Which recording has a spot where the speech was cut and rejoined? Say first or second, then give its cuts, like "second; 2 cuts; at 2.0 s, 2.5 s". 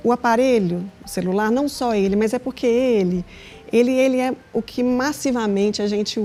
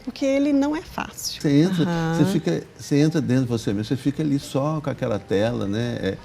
second; 1 cut; at 1.4 s